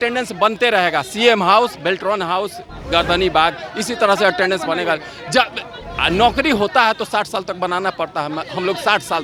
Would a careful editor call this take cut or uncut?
uncut